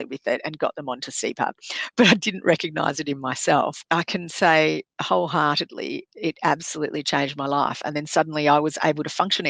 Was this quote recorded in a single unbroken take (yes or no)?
no